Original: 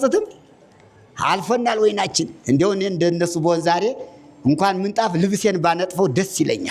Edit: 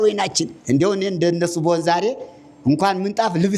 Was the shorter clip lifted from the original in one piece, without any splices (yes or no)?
yes